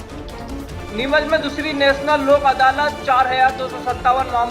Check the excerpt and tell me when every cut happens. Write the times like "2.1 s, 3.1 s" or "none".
0.9 s